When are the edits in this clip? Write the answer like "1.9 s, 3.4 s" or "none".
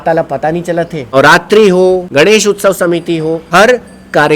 1.1 s, 2.1 s, 3.4 s